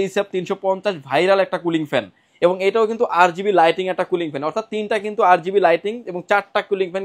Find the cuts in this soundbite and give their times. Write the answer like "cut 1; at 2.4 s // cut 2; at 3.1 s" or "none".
none